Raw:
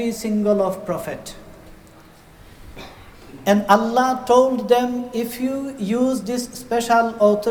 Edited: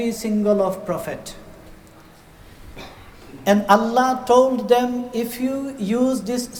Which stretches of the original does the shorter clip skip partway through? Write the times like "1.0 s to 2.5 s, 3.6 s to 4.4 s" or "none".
none